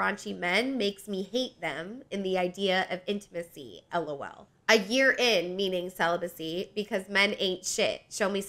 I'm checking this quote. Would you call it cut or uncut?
uncut